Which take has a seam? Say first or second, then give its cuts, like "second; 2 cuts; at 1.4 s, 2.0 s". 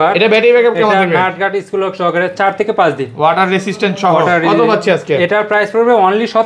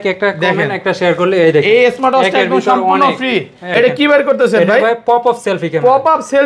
second; 1 cut; at 3.7 s